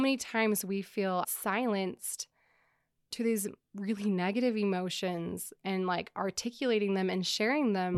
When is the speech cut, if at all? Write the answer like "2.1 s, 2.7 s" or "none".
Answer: 1.2 s